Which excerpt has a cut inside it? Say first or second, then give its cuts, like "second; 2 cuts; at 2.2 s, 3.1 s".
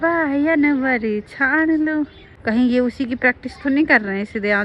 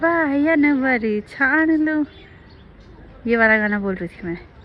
first; 1 cut; at 2.3 s